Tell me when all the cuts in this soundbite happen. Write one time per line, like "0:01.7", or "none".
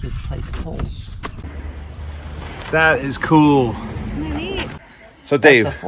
0:01.4
0:04.8

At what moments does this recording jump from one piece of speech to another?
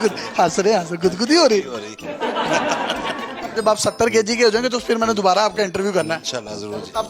0:03.6

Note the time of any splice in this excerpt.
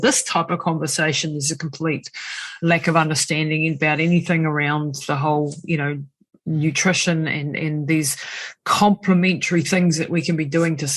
none

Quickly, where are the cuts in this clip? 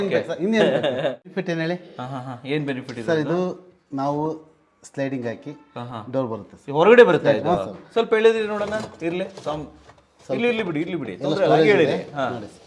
0:01.4

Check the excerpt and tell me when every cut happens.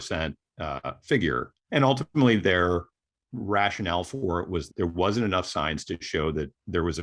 0:01.5
0:04.7

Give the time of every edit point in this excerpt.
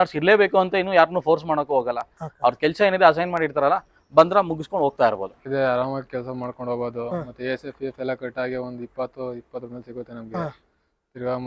0:05.4

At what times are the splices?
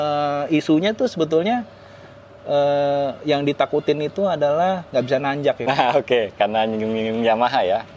0:05.6

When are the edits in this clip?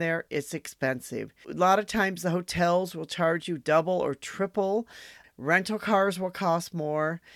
0:01.5
0:05.2

